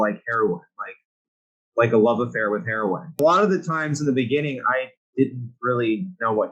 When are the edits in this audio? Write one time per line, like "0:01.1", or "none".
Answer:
0:03.2